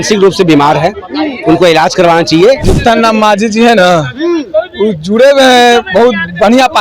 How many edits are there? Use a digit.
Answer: 1